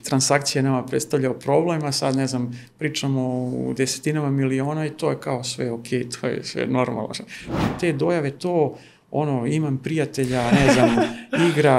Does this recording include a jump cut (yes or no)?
yes